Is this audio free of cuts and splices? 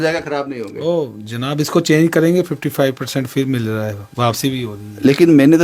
yes; 0 cuts

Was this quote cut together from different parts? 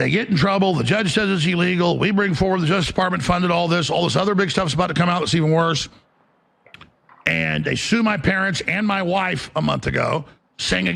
no; 0 cuts

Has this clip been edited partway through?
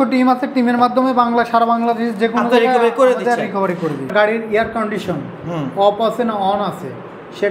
yes; 1 cut; at 4.1 s

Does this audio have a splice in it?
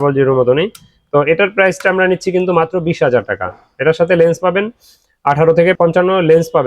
yes; 1 cut; at 5.8 s

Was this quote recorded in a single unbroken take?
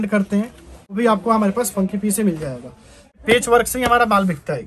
no; 2 cuts; at 1.0 s, 3.1 s

